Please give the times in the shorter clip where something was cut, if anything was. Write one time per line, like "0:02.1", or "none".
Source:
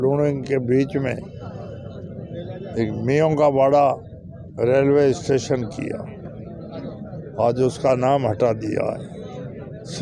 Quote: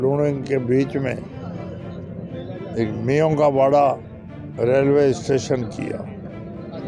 none